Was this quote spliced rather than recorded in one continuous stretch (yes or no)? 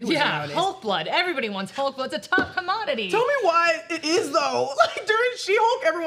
no